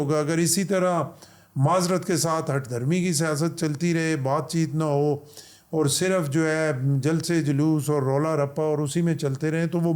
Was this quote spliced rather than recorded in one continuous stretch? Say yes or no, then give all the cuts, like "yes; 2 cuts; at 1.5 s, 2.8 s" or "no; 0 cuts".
no; 0 cuts